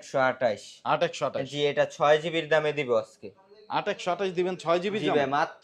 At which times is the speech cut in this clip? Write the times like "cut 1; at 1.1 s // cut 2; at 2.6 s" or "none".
none